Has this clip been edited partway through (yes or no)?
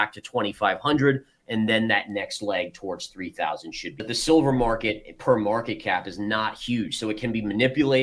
yes